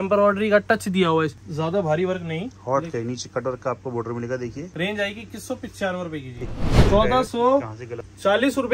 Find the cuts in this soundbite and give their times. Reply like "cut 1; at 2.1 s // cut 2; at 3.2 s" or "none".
cut 1; at 1.4 s // cut 2; at 2.5 s // cut 3; at 4.7 s // cut 4; at 6.8 s